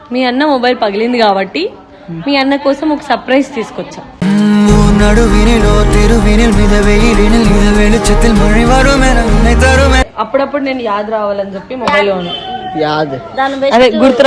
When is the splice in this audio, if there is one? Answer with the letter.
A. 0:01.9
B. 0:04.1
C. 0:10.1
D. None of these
C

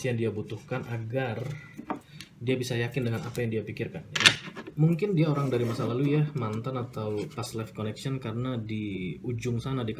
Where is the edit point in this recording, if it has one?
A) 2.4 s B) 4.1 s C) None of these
B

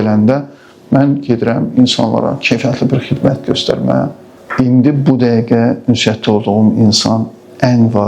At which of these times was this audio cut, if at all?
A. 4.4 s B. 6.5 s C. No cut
A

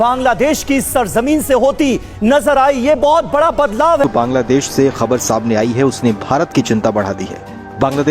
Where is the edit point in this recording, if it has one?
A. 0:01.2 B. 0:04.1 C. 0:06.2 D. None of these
B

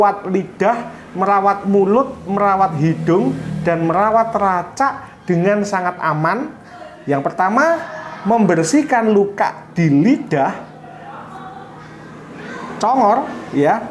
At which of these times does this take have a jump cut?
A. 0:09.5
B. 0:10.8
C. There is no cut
C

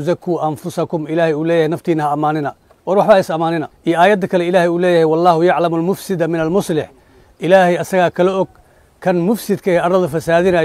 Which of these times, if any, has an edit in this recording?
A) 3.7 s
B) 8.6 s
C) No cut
A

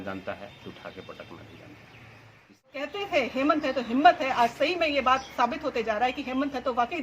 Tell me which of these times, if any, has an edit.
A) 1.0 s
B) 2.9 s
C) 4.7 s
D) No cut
B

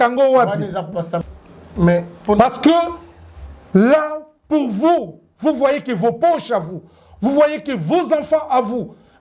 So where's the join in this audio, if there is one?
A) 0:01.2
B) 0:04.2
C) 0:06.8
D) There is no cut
A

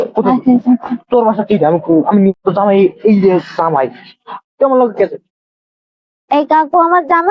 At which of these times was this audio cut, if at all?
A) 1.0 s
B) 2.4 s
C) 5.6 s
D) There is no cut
B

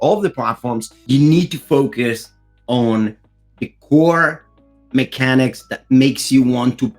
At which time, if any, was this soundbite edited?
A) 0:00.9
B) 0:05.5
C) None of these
A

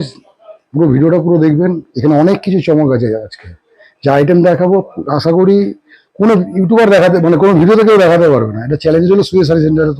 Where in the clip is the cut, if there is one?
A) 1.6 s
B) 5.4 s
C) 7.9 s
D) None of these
D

